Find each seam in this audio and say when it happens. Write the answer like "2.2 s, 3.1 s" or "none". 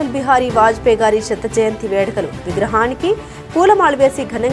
none